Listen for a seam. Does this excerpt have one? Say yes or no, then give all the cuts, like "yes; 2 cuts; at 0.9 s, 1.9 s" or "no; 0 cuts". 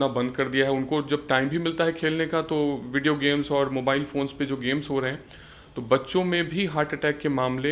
no; 0 cuts